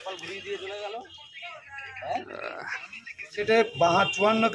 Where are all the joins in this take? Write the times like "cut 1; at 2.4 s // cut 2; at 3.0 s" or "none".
cut 1; at 3.4 s